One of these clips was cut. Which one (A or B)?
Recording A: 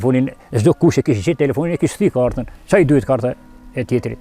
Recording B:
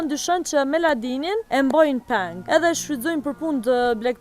B